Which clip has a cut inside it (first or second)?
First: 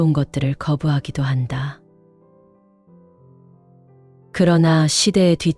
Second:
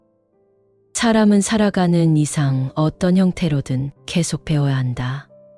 first